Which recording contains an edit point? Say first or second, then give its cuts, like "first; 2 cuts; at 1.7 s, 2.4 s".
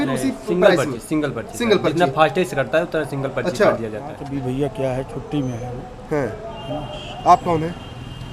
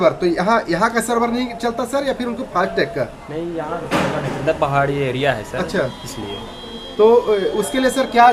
first; 1 cut; at 4.1 s